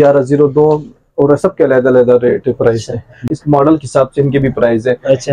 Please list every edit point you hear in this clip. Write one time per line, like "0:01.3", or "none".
0:03.3